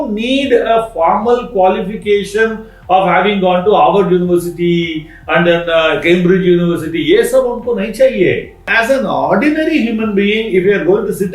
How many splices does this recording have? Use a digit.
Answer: 1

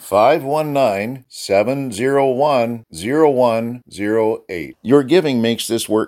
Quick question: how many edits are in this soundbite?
0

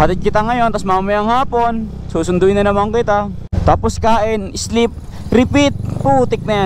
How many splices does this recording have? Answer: 1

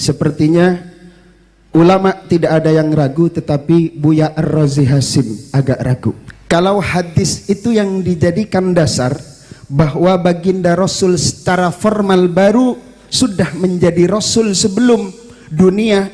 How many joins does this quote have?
1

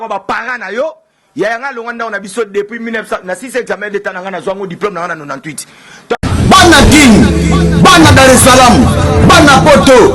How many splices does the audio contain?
1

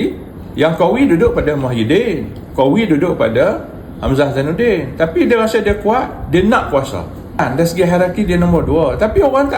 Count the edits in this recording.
1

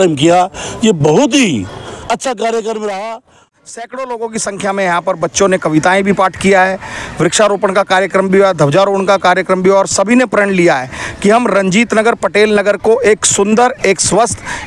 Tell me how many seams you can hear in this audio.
1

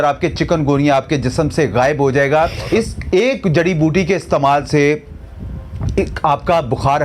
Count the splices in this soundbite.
1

